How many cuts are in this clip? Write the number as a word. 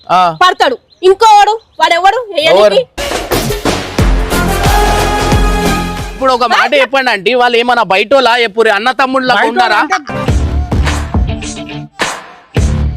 one